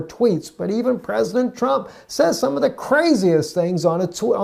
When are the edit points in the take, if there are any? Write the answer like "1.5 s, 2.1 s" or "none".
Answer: none